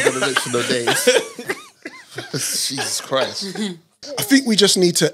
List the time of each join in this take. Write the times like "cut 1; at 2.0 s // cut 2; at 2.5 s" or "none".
cut 1; at 3.9 s

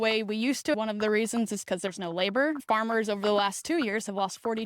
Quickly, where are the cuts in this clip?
cut 1; at 0.7 s // cut 2; at 2.6 s

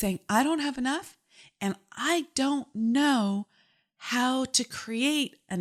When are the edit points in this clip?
none

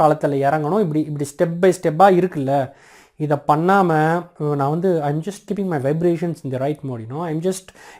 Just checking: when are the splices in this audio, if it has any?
cut 1; at 4.3 s

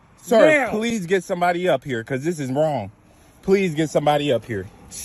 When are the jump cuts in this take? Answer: none

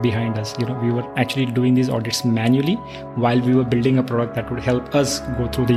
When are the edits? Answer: none

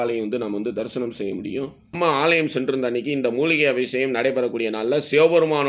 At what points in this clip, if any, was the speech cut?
cut 1; at 1.9 s

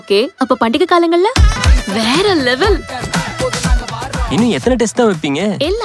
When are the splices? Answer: cut 1; at 1.6 s

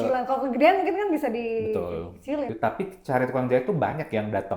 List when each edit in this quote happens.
cut 1; at 2.5 s

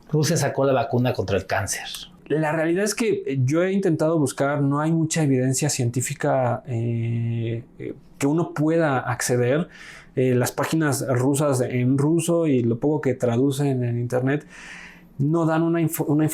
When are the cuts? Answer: cut 1; at 2.2 s

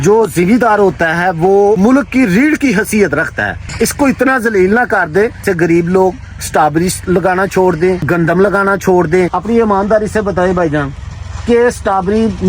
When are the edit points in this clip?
cut 1; at 1.8 s // cut 2; at 3.7 s // cut 3; at 5.4 s // cut 4; at 8.0 s // cut 5; at 9.4 s

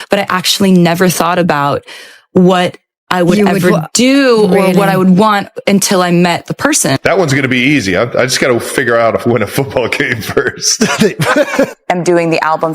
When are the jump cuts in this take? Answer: cut 1; at 7.0 s // cut 2; at 11.5 s

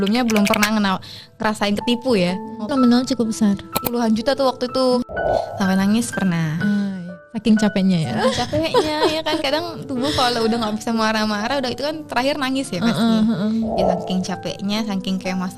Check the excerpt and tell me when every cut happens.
cut 1; at 2.7 s // cut 2; at 3.8 s // cut 3; at 5.0 s // cut 4; at 6.9 s

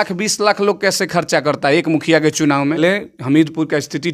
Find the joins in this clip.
cut 1; at 2.8 s

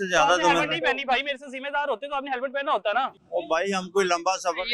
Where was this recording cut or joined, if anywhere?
cut 1; at 3.1 s

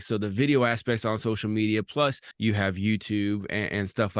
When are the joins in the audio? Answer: cut 1; at 2.3 s

